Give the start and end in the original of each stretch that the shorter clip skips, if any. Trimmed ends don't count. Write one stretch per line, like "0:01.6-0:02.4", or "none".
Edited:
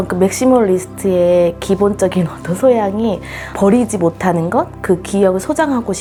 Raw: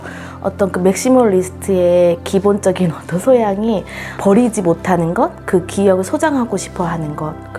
none